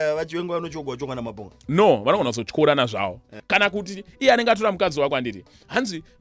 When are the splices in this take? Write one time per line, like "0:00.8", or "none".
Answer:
0:03.3

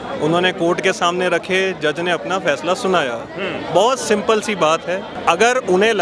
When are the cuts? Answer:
0:05.1

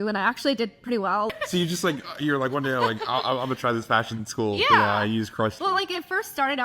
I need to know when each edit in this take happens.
0:01.3
0:05.6

